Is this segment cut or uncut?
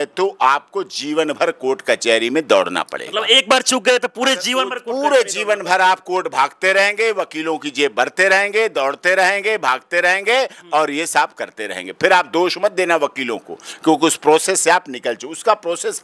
uncut